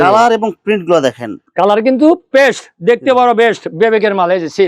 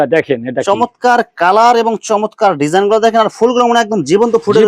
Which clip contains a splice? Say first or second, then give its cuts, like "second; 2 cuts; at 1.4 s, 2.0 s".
first; 1 cut; at 1.4 s